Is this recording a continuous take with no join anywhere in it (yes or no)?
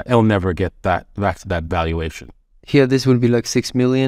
yes